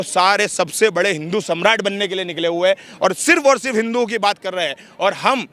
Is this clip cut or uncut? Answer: uncut